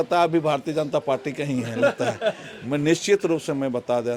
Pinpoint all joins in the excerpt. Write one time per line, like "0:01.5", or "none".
none